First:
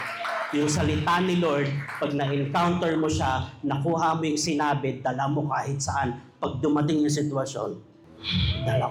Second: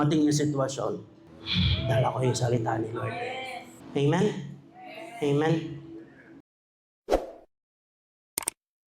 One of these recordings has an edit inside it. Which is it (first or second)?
second